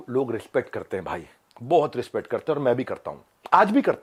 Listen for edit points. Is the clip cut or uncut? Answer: uncut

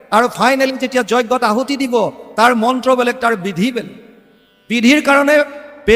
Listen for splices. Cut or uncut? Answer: uncut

